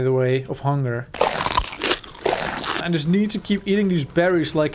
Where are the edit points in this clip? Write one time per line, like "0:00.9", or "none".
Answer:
0:02.7